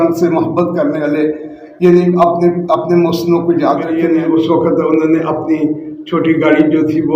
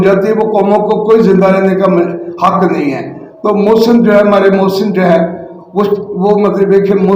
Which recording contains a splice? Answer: first; 1 cut; at 4.0 s

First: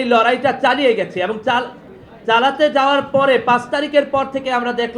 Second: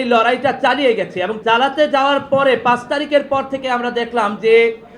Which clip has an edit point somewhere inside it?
second; 1 cut; at 1.4 s

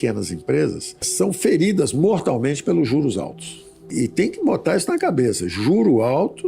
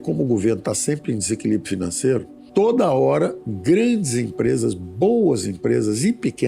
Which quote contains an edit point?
second; 2 cuts; at 2.4 s, 3.5 s

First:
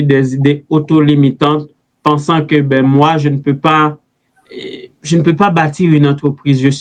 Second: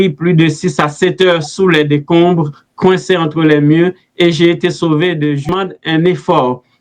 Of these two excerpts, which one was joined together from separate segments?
second; 1 cut; at 5.5 s

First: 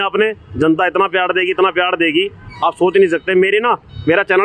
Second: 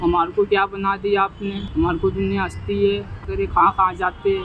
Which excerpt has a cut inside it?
second; 2 cuts; at 1.6 s, 3.2 s

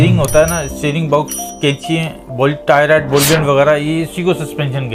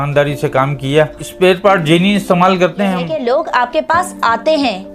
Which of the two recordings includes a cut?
second; 1 cut; at 3.1 s

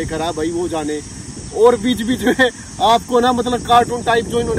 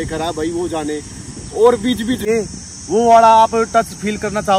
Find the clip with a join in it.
second; 1 cut; at 2.2 s

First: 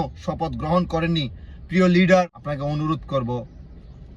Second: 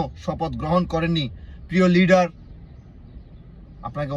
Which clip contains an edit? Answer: first; 1 cut; at 2.4 s

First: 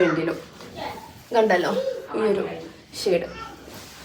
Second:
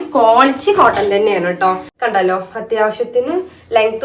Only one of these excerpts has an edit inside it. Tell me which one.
second; 1 cut; at 1.9 s

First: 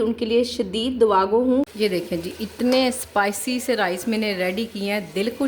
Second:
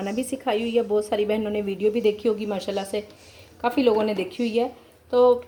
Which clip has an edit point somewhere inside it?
first; 1 cut; at 1.7 s

